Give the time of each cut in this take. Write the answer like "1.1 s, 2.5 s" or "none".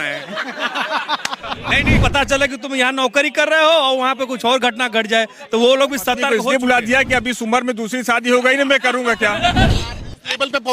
2.0 s, 6.3 s, 9.7 s